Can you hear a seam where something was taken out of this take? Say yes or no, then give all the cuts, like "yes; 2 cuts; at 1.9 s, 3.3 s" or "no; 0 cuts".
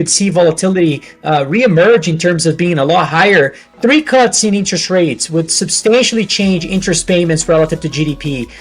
yes; 1 cut; at 3.6 s